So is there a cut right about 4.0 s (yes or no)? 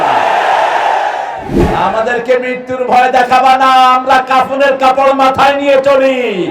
no